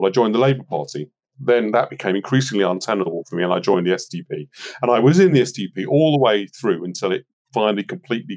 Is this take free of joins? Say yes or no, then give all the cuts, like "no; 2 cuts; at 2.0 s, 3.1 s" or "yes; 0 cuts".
no; 2 cuts; at 1.3 s, 3.2 s